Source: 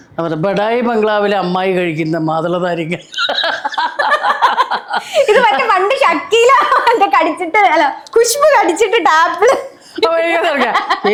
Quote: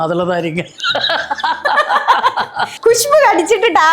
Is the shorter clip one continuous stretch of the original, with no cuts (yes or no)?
no